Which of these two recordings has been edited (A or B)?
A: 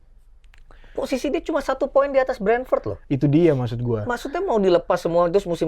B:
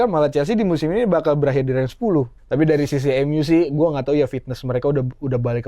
B